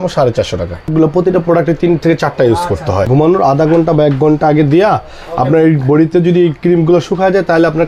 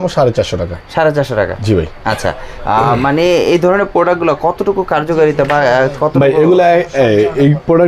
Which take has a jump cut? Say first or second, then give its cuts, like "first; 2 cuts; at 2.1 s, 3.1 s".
first; 2 cuts; at 1.1 s, 3.1 s